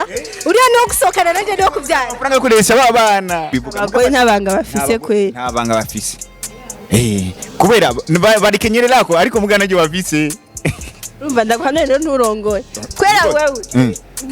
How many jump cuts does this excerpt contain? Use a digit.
1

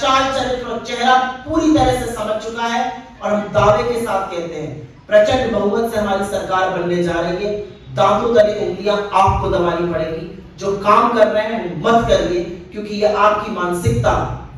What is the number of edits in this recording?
0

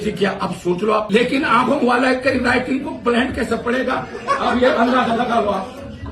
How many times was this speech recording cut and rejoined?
1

